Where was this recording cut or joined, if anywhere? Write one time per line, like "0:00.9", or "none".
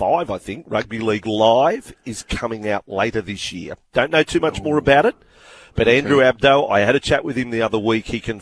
none